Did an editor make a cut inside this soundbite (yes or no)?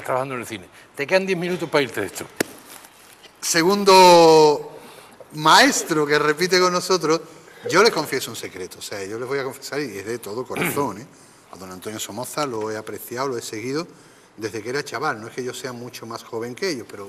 no